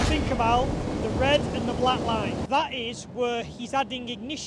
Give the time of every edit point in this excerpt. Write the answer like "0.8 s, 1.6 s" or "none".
2.4 s